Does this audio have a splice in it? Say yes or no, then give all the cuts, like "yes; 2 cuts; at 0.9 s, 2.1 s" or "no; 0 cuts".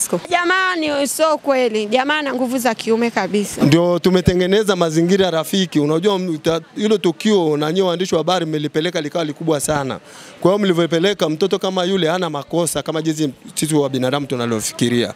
yes; 1 cut; at 3.5 s